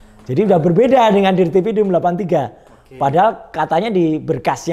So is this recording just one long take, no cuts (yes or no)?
yes